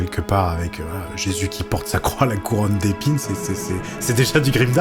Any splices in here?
no; 0 cuts

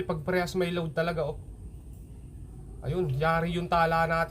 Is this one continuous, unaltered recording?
yes; 0 cuts

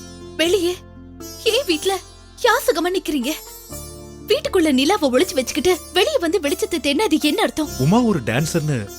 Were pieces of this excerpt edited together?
yes; 1 cut; at 7.7 s

